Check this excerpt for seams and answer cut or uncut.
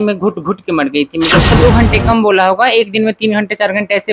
cut